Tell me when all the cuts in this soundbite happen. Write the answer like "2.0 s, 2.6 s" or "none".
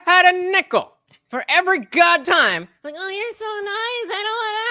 2.2 s